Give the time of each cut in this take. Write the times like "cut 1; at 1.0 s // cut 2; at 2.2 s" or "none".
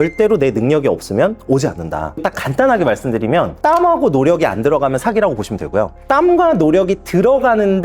cut 1; at 2.2 s